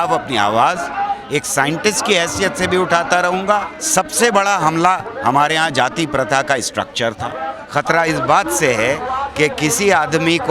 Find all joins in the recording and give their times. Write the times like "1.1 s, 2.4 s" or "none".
3.8 s, 7.6 s